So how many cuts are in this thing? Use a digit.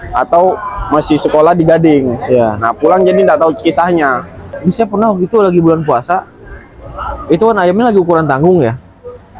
1